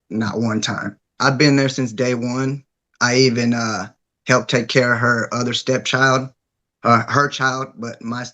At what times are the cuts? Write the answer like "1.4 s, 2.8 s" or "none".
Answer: 1.0 s